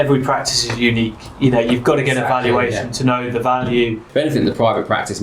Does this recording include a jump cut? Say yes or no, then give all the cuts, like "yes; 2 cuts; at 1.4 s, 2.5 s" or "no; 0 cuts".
yes; 1 cut; at 4.0 s